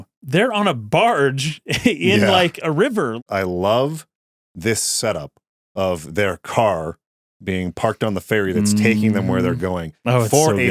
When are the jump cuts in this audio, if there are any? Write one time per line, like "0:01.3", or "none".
0:03.1